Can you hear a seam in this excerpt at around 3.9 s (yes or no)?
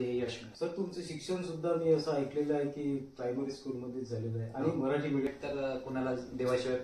no